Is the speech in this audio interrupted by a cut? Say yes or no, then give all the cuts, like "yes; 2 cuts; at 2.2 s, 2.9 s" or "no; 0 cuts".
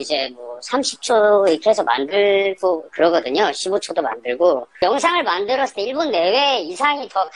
yes; 1 cut; at 4.7 s